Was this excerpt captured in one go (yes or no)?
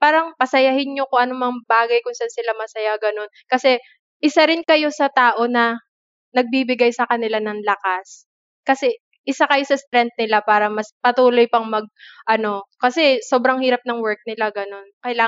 yes